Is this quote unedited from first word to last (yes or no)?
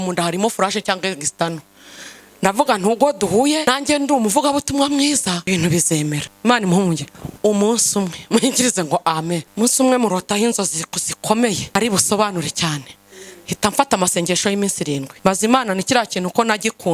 no